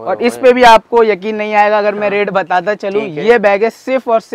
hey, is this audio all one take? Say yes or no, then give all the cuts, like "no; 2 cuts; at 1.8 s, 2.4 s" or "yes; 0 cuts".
yes; 0 cuts